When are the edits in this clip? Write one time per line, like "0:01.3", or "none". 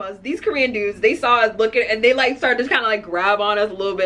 none

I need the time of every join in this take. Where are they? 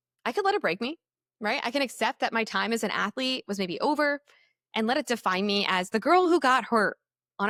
none

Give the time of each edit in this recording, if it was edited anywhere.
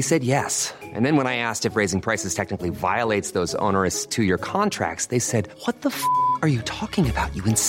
none

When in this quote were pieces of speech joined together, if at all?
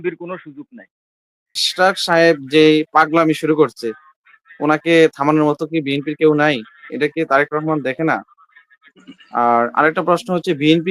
0:01.6

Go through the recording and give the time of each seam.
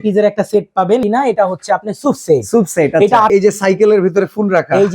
0:01.0
0:03.3

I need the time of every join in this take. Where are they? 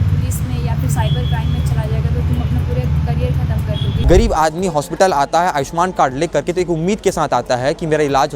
0:03.9

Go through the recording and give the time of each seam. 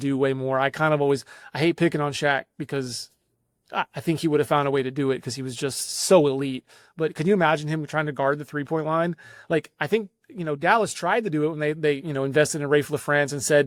none

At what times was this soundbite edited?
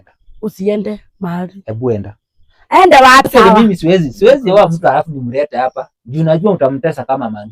0:03.3

